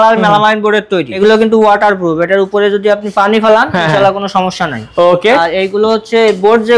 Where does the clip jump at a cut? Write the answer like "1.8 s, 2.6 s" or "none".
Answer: 1.1 s